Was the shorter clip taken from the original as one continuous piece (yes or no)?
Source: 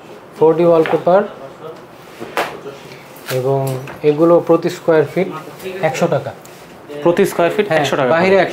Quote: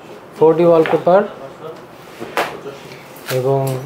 yes